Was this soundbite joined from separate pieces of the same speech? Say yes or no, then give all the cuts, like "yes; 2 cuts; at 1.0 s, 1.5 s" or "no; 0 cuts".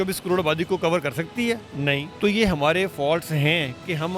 yes; 1 cut; at 2.1 s